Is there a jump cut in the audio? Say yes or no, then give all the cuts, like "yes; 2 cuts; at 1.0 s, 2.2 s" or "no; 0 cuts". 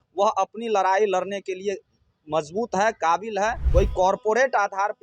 yes; 1 cut; at 3.6 s